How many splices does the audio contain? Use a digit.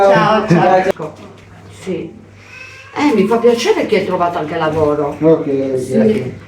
1